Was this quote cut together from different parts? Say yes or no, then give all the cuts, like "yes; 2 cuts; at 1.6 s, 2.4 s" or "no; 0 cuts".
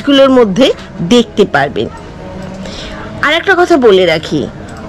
no; 0 cuts